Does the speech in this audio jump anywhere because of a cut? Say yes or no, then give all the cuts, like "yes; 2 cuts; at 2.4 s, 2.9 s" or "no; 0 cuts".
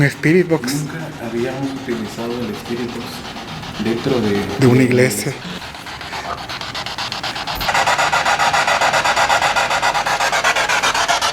yes; 2 cuts; at 5.5 s, 7.7 s